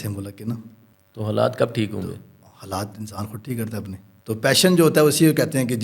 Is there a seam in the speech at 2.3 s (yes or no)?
no